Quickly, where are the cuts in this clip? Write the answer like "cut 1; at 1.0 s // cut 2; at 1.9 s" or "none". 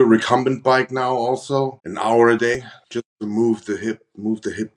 cut 1; at 1.8 s // cut 2; at 2.8 s